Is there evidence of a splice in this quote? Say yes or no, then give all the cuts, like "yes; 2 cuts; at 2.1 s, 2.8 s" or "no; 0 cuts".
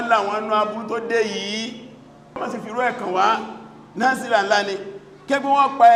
no; 0 cuts